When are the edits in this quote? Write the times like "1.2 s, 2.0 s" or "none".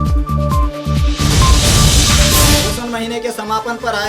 2.5 s